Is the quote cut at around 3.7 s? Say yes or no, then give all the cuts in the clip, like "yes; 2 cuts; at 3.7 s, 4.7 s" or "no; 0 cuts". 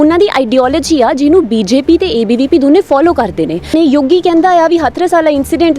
yes; 1 cut; at 3.7 s